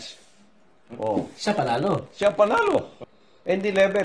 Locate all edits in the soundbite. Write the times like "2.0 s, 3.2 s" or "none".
3.0 s